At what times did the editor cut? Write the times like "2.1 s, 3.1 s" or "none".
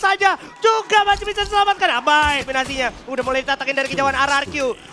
2.5 s

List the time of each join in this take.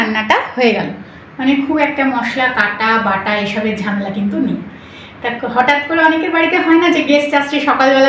none

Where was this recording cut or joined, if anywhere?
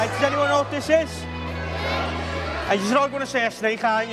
none

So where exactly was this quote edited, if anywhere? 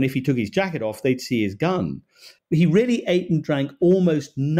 2.3 s

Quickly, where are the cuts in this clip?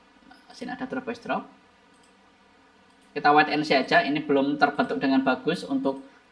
none

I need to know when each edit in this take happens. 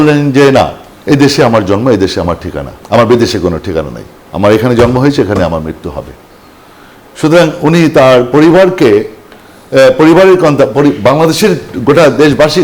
none

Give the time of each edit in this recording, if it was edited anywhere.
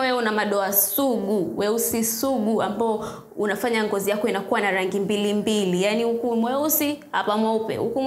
none

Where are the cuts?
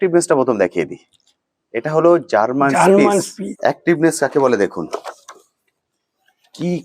3.4 s

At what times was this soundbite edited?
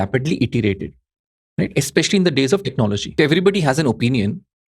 3.1 s

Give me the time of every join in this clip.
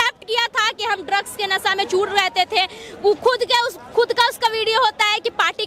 none

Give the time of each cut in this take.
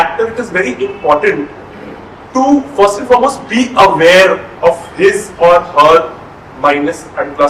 none

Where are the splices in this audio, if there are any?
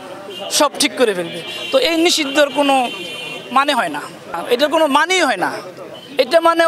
4.4 s

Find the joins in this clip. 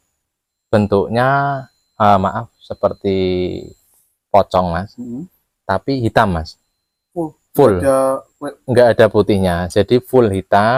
none

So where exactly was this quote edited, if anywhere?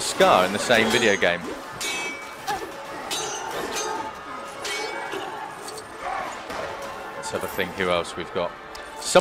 7.5 s

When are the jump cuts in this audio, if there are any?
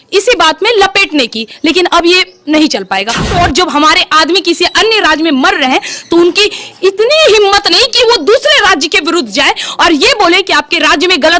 3.3 s

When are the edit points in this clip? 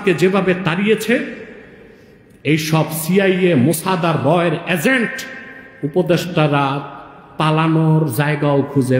none

